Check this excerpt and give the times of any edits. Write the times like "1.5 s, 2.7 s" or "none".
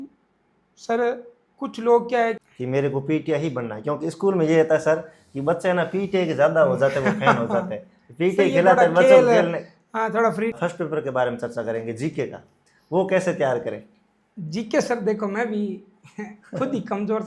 2.4 s, 10.5 s